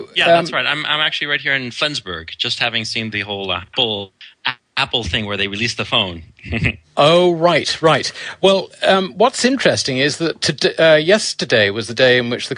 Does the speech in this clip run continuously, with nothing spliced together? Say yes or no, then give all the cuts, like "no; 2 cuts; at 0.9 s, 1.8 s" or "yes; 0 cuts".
no; 1 cut; at 5.5 s